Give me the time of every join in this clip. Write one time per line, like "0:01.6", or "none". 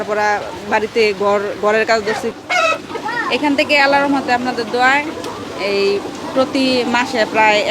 0:02.3

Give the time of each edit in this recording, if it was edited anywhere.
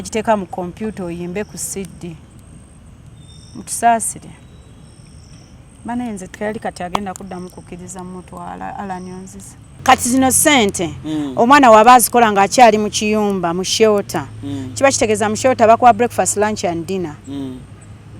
0:09.7

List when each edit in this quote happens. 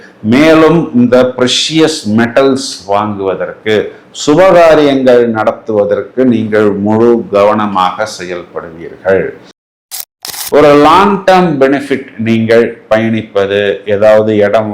0:09.9

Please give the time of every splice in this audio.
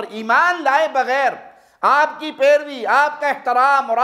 none

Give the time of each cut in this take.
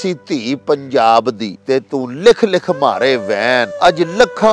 0:01.5
0:03.7

